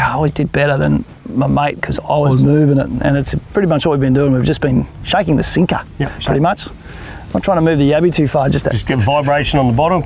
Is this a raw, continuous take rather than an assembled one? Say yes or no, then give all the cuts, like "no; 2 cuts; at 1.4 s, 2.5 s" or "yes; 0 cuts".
yes; 0 cuts